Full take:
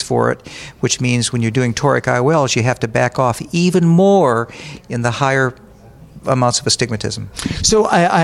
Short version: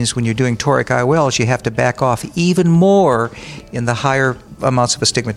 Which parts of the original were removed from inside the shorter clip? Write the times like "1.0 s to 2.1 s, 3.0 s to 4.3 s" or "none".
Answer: 5.6 s to 6.1 s